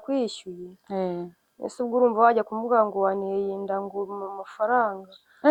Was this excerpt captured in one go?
yes; 0 cuts

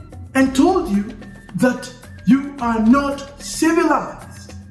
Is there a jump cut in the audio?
no; 0 cuts

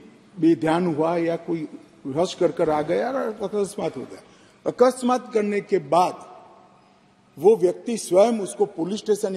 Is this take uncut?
yes; 0 cuts

